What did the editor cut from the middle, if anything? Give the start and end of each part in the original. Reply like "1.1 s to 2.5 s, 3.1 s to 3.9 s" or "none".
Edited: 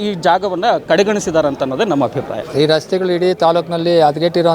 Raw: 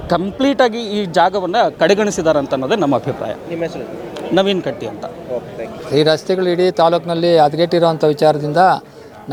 3.3 s to 5.8 s